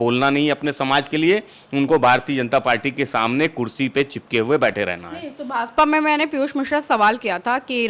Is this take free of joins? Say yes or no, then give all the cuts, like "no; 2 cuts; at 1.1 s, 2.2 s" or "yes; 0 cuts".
yes; 0 cuts